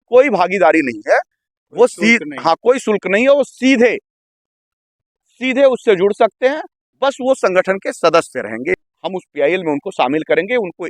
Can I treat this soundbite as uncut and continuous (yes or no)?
no